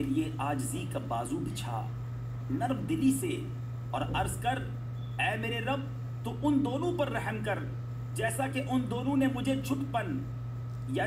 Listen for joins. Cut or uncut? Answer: uncut